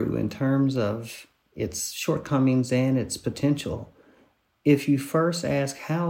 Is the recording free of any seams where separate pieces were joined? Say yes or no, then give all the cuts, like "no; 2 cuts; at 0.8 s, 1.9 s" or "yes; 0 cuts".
yes; 0 cuts